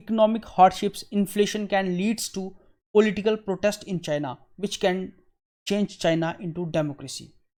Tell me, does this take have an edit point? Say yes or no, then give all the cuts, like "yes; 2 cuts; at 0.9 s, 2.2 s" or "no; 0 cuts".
no; 0 cuts